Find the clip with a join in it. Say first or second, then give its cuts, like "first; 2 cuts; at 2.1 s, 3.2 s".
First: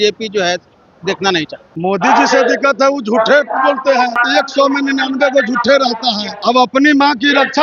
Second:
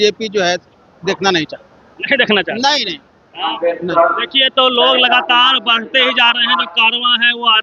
first; 3 cuts; at 1.7 s, 4.2 s, 6.3 s